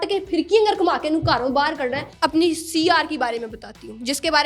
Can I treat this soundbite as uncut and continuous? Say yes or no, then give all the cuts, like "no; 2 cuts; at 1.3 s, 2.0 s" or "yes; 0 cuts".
no; 1 cut; at 2.1 s